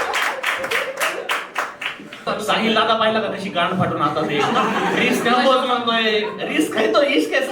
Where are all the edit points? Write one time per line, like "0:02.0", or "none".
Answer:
0:02.2